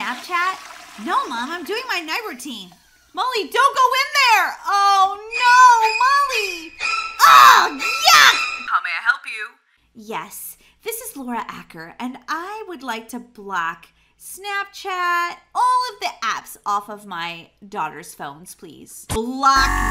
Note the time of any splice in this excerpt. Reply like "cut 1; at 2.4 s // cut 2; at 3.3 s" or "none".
cut 1; at 8.5 s // cut 2; at 19.2 s